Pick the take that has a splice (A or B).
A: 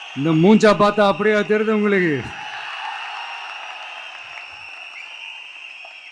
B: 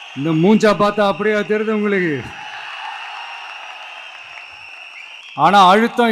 B